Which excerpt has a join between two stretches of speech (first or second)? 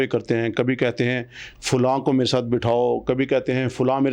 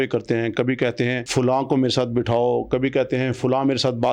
second